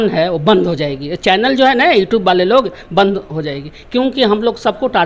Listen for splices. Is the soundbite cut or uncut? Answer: uncut